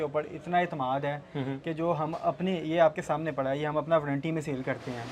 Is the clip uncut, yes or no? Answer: yes